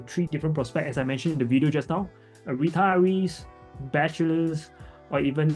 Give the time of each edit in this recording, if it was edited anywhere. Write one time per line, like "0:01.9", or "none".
none